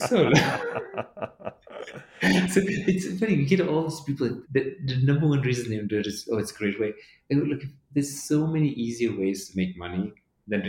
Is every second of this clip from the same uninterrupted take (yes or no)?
no